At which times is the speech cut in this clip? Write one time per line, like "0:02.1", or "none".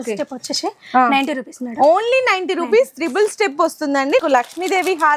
0:04.2